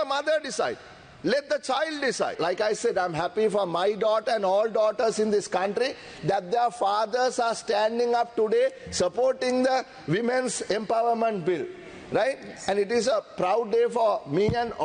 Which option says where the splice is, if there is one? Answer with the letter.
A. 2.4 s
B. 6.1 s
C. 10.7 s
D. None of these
A